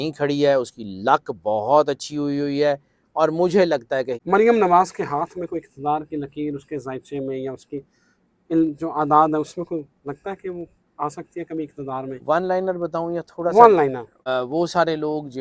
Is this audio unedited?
no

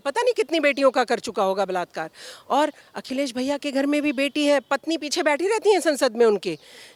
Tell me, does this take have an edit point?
no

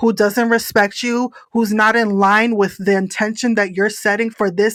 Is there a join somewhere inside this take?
no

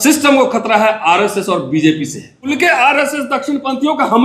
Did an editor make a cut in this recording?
yes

